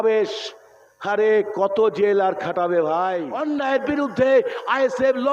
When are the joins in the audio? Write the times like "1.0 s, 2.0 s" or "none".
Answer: 3.3 s